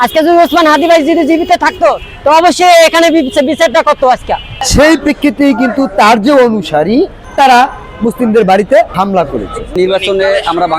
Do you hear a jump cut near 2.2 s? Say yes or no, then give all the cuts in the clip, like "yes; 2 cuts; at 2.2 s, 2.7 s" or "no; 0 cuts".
no; 3 cuts; at 4.7 s, 7.2 s, 9.1 s